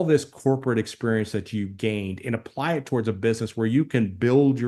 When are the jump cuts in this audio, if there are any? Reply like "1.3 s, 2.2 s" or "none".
none